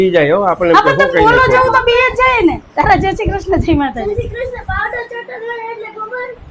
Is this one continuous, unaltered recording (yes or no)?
yes